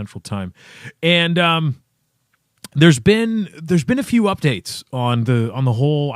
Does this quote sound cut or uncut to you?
uncut